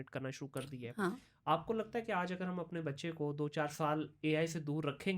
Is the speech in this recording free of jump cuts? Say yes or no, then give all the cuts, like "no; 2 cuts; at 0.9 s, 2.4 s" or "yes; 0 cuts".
yes; 0 cuts